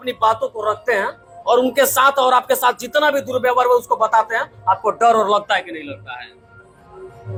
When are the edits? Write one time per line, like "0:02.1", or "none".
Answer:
none